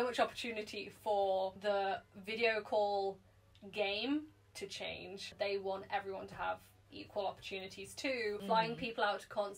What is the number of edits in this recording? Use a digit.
2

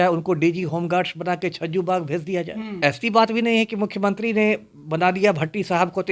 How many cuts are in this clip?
1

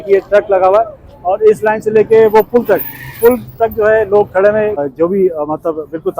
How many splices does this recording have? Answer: 1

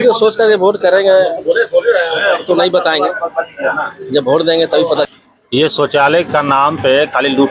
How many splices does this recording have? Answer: 1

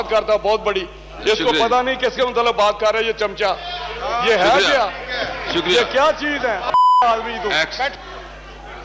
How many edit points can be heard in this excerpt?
0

